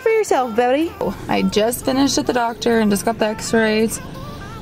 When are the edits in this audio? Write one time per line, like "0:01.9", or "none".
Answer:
0:01.0